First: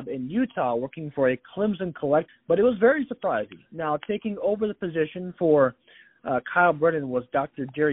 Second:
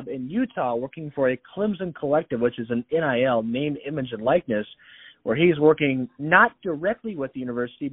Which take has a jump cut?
first; 1 cut; at 2.3 s

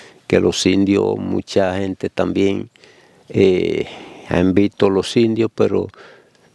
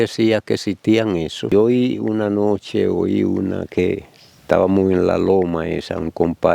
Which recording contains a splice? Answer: second; 1 cut; at 1.5 s

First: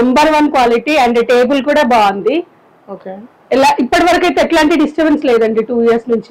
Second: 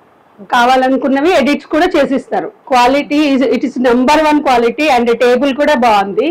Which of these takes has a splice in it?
second; 1 cut; at 2.6 s

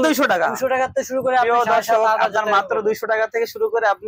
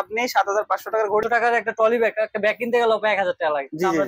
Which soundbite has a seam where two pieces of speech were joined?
second; 1 cut; at 1.2 s

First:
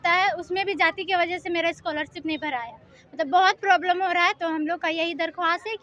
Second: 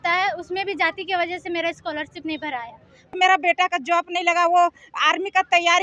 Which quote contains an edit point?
second; 1 cut; at 3.1 s

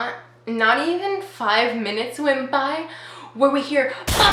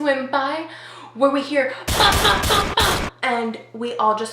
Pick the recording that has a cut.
second; 1 cut; at 3.1 s

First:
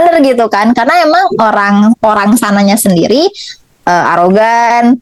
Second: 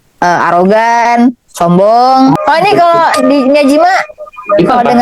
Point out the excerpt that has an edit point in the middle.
second; 1 cut; at 2.4 s

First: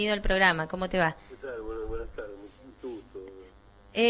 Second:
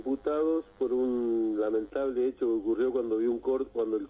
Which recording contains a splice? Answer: second; 1 cut; at 2.4 s

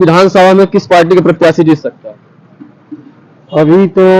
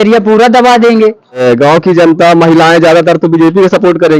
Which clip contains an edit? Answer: second; 1 cut; at 1.4 s

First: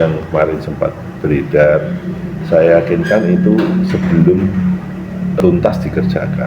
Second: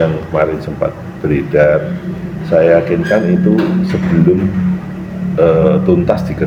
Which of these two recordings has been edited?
first; 1 cut; at 5.4 s

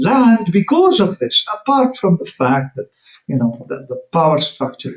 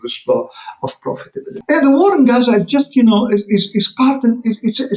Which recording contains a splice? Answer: second; 1 cut; at 1.5 s

